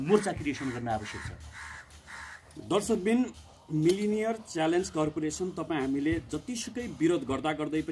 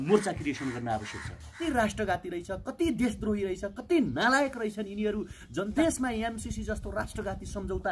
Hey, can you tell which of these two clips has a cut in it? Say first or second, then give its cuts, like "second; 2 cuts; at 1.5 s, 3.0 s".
second; 2 cuts; at 1.6 s, 5.7 s